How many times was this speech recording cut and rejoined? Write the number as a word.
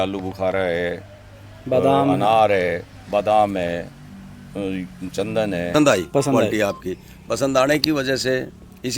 one